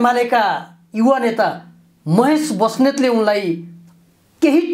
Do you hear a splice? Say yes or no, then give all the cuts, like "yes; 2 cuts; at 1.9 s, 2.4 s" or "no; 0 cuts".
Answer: no; 0 cuts